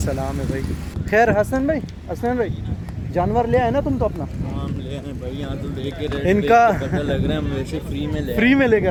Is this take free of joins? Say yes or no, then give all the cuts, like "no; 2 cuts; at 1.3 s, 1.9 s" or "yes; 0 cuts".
yes; 0 cuts